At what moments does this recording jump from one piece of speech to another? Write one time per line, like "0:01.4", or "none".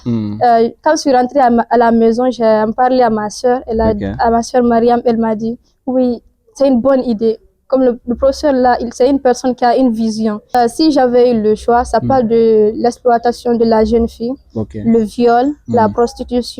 0:10.5

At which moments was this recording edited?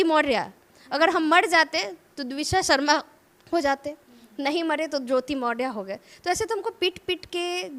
none

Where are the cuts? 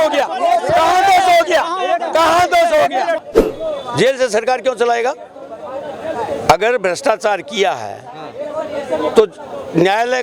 0:03.2

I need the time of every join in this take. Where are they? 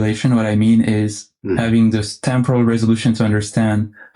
0:01.4

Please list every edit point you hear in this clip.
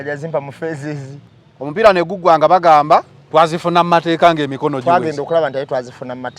0:01.2

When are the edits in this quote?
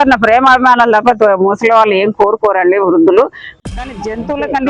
0:03.4

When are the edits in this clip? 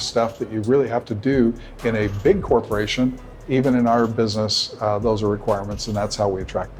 none

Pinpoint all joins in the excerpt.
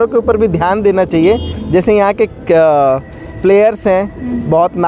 none

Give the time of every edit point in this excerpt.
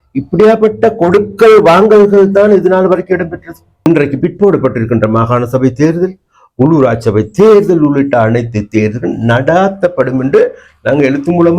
0:03.9

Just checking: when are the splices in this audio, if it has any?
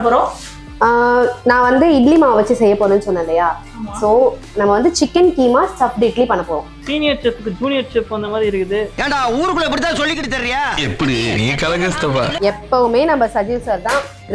0:06.7
0:12.3

